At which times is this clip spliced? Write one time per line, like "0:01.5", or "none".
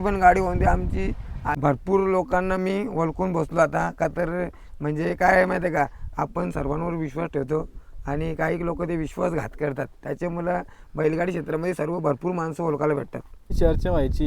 0:01.4
0:13.4